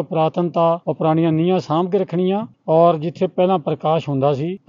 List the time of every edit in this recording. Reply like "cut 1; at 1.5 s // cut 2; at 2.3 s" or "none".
none